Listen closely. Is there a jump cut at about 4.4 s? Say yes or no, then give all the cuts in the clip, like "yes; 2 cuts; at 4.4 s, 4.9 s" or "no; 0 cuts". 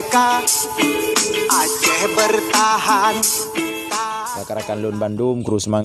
yes; 1 cut; at 4.4 s